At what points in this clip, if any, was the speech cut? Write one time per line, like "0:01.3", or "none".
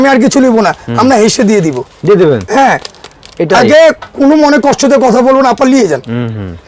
none